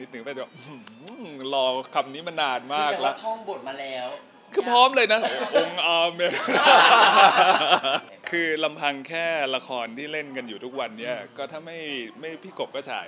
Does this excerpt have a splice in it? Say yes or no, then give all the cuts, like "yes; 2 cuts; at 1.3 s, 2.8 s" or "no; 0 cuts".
yes; 1 cut; at 8.0 s